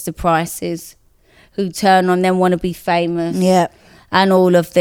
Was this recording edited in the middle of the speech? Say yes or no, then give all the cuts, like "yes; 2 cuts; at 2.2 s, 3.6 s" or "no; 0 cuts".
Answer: no; 0 cuts